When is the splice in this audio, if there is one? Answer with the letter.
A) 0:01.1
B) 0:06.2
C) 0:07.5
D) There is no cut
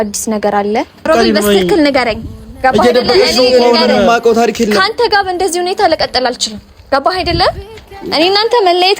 A